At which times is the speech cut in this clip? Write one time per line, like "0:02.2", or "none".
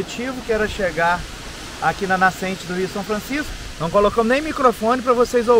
0:03.6